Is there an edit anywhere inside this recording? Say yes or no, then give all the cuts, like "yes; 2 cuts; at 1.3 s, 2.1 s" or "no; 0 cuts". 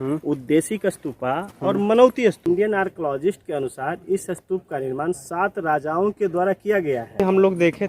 yes; 2 cuts; at 2.4 s, 7.2 s